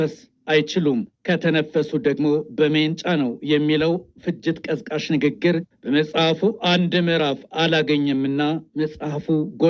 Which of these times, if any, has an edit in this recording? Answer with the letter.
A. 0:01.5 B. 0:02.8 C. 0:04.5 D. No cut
D